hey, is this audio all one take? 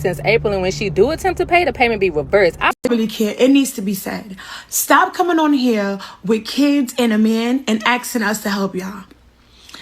no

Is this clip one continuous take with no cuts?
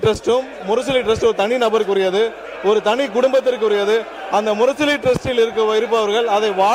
yes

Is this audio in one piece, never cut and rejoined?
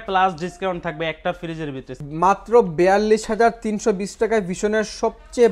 no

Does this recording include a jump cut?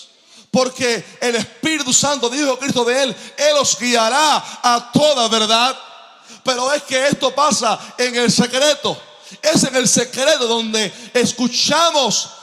no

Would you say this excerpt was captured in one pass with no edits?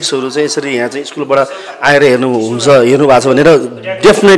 yes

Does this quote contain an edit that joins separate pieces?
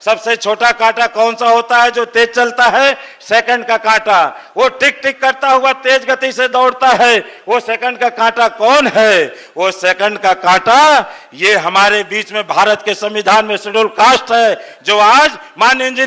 no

